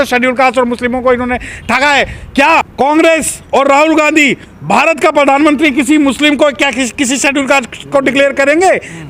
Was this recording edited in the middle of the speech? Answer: no; 0 cuts

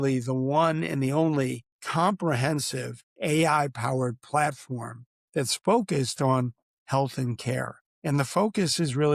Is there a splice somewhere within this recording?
no; 0 cuts

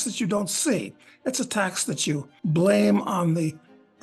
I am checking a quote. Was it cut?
yes; 1 cut; at 2.3 s

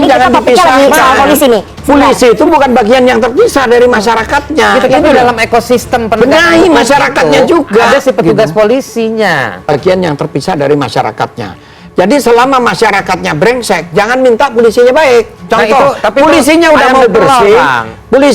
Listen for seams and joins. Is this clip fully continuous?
no; 1 cut; at 9.8 s

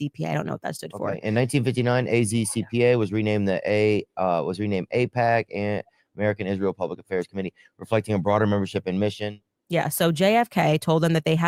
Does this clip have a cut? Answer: no; 0 cuts

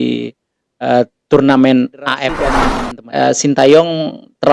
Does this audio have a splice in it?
yes; 1 cut; at 2.6 s

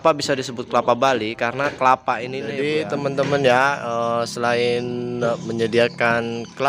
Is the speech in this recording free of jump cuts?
no; 1 cut; at 2.4 s

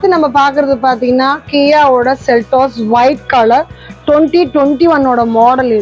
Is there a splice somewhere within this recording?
no; 0 cuts

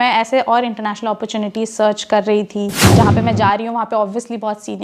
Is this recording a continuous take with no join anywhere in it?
no; 1 cut; at 2.8 s

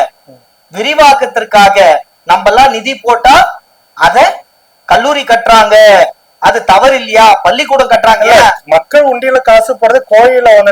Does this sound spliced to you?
no; 0 cuts

